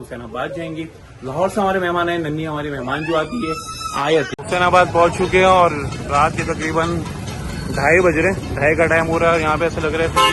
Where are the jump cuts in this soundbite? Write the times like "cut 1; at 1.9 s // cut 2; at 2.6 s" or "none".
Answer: cut 1; at 4.3 s